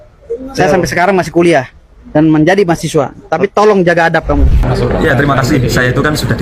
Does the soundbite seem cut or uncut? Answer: cut